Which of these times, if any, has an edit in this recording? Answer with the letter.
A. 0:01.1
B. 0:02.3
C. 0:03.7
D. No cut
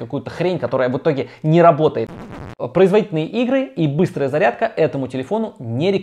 B